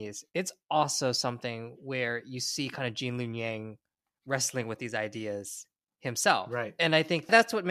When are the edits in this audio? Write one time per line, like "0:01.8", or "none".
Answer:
none